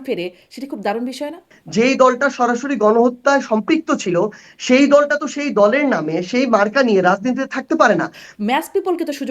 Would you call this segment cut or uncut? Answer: cut